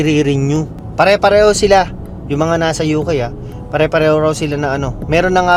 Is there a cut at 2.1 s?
no; 0 cuts

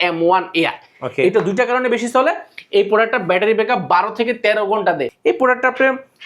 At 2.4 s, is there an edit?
no; 1 cut; at 5.1 s

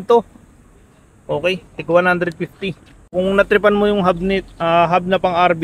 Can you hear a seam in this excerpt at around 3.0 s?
yes; 1 cut; at 3.0 s

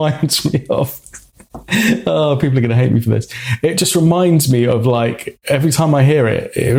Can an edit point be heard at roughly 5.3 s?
no; 0 cuts

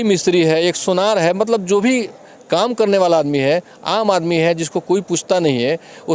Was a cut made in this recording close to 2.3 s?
no; 0 cuts

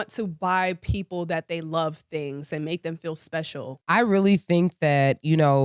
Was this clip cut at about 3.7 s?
yes; 1 cut; at 3.7 s

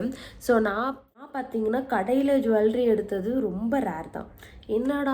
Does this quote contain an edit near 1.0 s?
yes; 1 cut; at 1.0 s

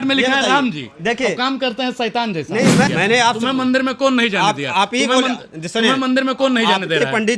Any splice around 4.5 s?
no; 1 cut; at 2.9 s

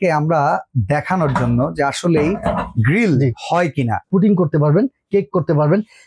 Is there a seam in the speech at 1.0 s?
no; 1 cut; at 4.0 s

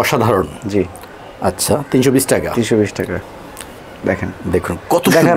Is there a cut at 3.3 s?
yes; 1 cut; at 3.3 s

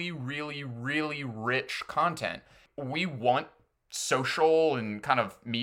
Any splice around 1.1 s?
no; 1 cut; at 2.6 s

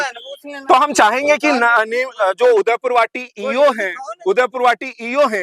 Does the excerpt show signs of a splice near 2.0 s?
no; 0 cuts

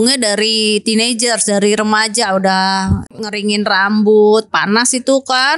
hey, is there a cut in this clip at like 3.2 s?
yes; 1 cut; at 3.2 s

